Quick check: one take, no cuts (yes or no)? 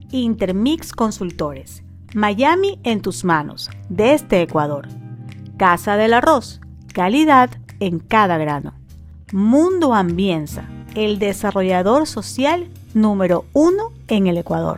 yes